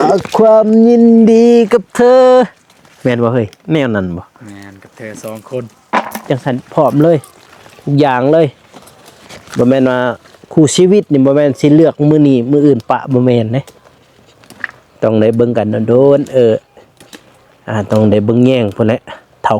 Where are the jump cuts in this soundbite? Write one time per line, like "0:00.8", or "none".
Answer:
0:06.3